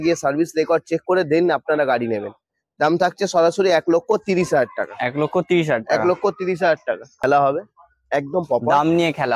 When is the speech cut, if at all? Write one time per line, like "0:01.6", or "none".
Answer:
0:07.2